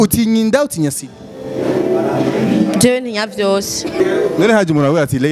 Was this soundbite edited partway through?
yes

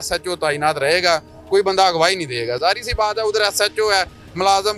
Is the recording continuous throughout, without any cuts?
yes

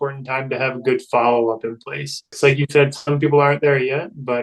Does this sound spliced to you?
yes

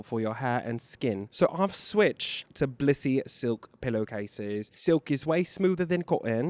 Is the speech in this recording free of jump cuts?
no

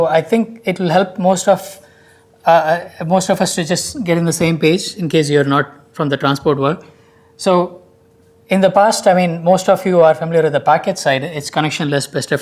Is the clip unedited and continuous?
no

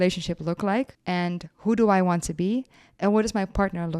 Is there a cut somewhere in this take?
yes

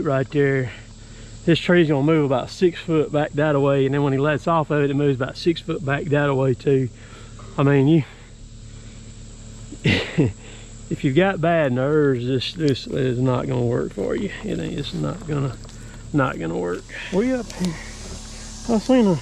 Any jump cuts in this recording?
yes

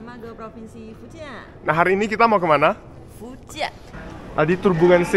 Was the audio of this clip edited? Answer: yes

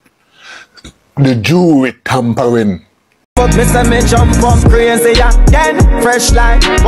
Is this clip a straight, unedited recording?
no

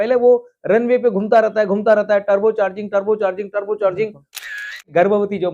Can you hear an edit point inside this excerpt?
yes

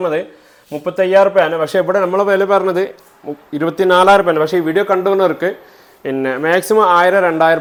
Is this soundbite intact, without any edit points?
yes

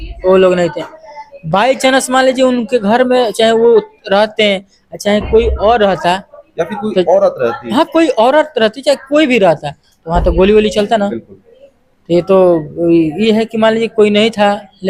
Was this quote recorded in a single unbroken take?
yes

